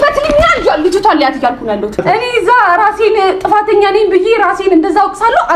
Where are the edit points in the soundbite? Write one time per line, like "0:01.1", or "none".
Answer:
0:02.0

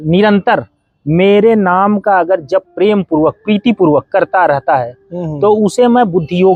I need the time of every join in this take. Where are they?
none

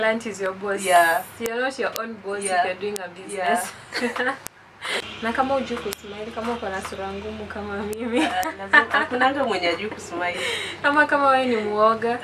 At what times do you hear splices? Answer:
0:05.0

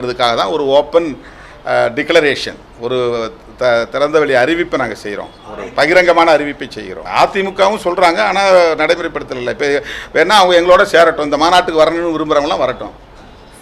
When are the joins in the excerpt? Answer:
0:06.9

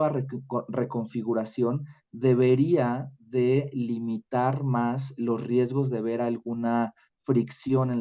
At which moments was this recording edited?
none

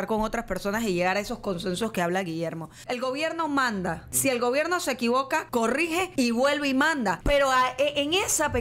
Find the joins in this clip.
0:02.7
0:04.1
0:05.6
0:07.2

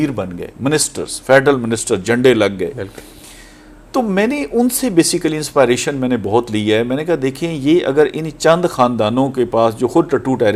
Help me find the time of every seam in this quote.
none

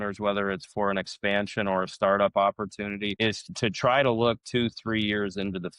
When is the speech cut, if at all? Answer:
0:03.4

